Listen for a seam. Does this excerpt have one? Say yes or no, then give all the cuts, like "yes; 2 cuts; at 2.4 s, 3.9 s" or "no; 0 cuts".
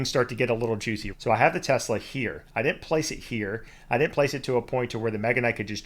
yes; 1 cut; at 1.1 s